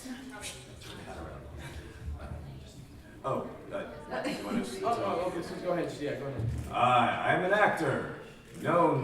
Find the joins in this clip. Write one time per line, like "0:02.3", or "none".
0:06.9